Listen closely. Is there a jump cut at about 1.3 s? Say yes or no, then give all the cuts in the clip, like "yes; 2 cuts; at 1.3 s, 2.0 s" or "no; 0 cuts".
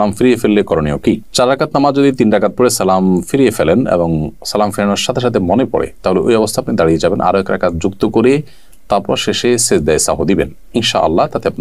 no; 0 cuts